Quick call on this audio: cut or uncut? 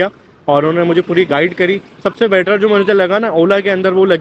uncut